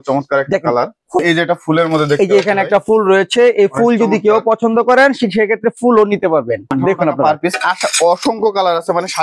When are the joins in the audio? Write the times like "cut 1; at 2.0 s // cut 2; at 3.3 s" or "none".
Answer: cut 1; at 1.2 s // cut 2; at 6.7 s